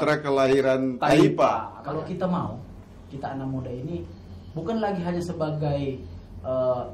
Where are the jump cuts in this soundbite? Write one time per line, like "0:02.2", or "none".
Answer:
0:01.7

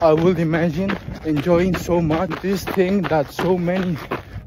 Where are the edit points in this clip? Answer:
0:01.1
0:02.3

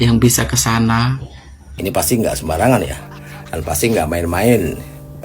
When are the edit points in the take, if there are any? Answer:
0:01.7

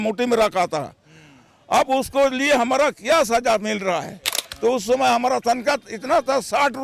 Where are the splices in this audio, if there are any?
0:04.4

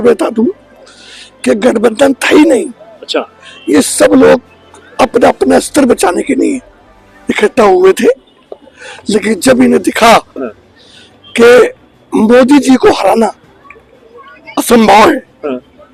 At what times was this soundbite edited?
none

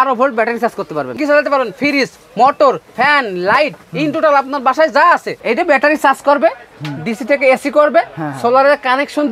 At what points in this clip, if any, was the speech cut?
0:01.1
0:05.3

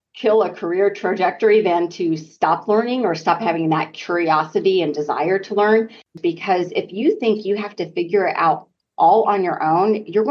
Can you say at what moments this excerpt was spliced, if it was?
0:06.1

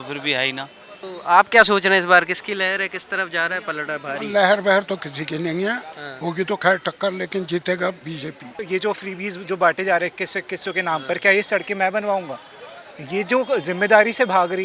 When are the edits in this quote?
0:01.0
0:08.6

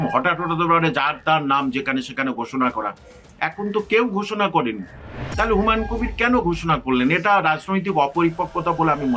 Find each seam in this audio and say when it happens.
none

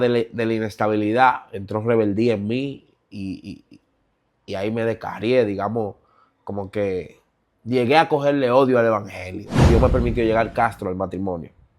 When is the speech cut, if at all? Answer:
0:09.6

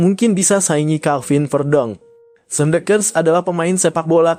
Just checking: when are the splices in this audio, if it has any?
none

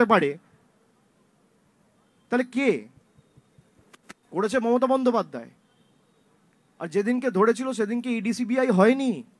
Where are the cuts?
none

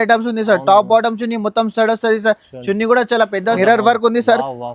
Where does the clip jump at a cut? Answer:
0:03.6

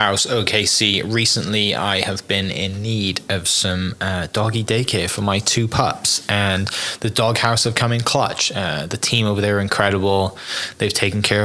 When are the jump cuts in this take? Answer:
none

